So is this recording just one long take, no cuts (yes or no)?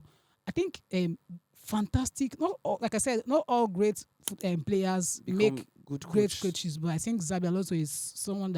yes